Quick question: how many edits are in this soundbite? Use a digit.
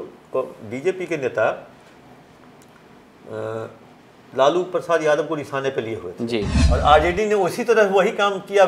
1